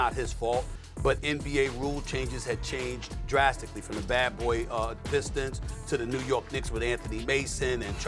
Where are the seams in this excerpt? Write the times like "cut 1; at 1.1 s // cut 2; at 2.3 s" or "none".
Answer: none